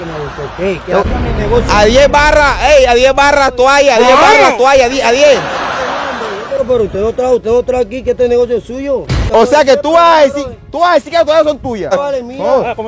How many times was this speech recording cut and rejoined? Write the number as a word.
three